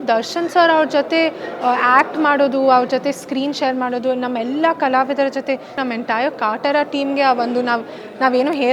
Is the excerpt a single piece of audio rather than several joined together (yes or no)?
no